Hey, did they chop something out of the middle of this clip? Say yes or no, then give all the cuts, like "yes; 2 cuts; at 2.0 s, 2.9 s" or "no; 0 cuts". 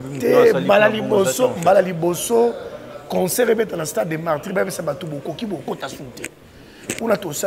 no; 0 cuts